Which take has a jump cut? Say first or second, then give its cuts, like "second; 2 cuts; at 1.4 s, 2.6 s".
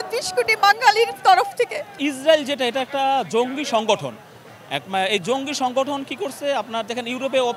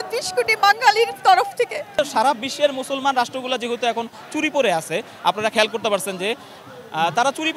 second; 1 cut; at 2.0 s